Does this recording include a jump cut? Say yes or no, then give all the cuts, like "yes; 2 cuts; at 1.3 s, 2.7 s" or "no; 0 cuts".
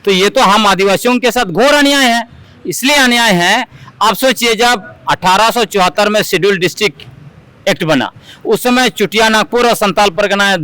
no; 0 cuts